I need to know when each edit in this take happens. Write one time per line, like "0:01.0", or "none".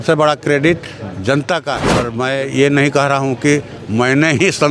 0:02.1